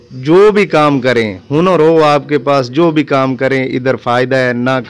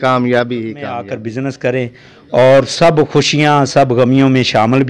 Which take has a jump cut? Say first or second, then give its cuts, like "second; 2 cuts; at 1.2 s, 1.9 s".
second; 1 cut; at 1.1 s